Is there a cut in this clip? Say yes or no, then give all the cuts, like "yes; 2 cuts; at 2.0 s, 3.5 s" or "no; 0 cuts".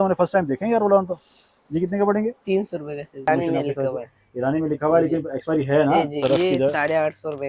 yes; 2 cuts; at 3.3 s, 6.2 s